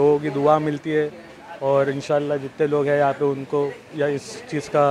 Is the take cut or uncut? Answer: uncut